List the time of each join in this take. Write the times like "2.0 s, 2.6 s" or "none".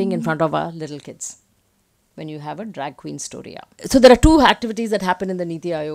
3.7 s